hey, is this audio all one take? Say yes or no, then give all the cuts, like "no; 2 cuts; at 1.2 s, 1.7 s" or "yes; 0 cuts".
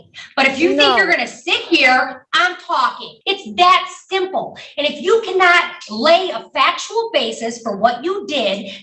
no; 1 cut; at 3.1 s